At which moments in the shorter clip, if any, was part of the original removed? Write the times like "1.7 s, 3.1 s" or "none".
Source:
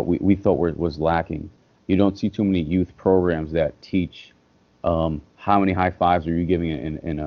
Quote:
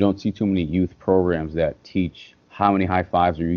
2.4 s